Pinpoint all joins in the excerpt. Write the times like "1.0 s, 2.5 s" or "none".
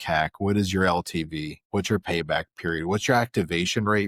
none